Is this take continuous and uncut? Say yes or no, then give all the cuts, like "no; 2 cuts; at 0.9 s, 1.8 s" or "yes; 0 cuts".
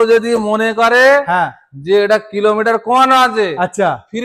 yes; 0 cuts